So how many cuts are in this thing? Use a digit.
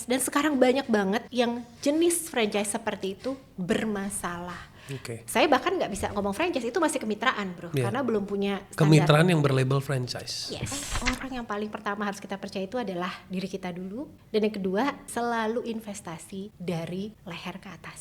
6